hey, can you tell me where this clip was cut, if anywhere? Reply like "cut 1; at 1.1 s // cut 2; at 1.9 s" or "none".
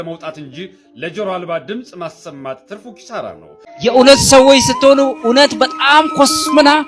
cut 1; at 3.7 s